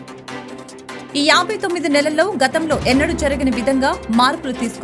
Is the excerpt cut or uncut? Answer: cut